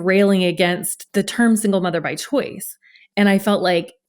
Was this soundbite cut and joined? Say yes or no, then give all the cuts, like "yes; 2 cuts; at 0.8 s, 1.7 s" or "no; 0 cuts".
yes; 1 cut; at 0.9 s